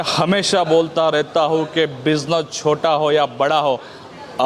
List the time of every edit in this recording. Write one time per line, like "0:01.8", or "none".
none